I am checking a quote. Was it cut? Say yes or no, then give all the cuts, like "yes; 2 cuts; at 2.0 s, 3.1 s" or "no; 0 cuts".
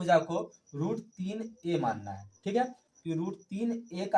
yes; 1 cut; at 2.8 s